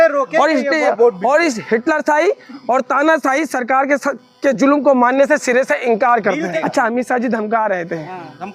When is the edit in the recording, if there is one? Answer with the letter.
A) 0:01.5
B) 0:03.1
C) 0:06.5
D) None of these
C